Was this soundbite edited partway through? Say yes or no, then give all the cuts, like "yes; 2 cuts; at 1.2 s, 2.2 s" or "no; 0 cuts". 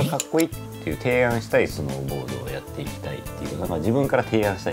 no; 0 cuts